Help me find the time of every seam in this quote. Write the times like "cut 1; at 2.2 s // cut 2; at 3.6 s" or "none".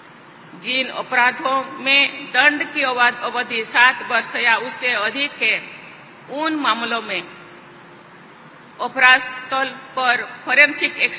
none